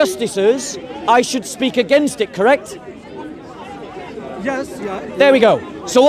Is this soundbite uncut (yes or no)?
yes